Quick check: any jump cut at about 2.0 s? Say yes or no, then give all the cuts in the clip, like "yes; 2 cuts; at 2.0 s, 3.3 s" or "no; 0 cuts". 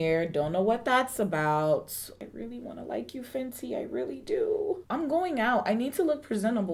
yes; 2 cuts; at 2.0 s, 4.8 s